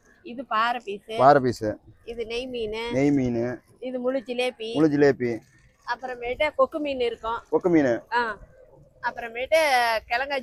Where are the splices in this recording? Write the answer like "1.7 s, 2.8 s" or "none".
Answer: none